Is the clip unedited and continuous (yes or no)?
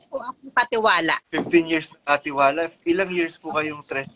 yes